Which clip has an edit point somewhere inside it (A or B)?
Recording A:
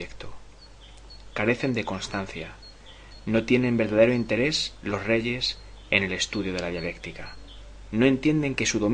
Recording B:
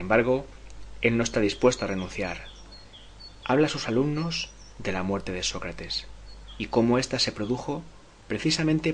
B